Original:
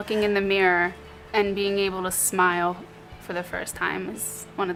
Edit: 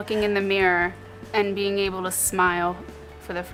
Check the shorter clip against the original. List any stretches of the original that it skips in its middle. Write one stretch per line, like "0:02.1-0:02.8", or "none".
none